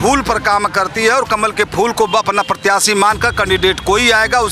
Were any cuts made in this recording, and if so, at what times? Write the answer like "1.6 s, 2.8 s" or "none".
none